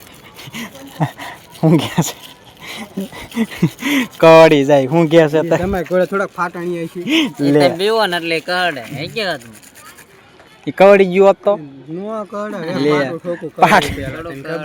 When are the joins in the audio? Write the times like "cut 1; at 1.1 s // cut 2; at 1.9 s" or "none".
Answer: none